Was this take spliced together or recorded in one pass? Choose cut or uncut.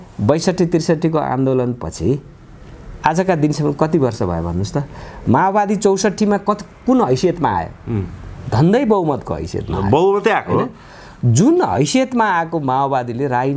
uncut